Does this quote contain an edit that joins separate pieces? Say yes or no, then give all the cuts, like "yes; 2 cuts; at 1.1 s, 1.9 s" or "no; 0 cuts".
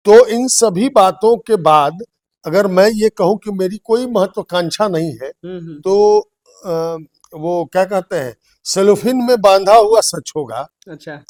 no; 0 cuts